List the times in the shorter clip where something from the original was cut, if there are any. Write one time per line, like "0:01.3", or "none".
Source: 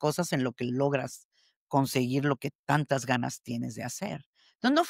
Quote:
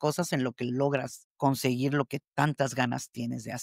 0:01.2